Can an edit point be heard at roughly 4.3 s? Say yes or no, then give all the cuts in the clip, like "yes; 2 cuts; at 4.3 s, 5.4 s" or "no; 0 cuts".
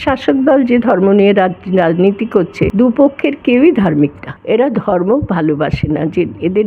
yes; 2 cuts; at 2.7 s, 4.3 s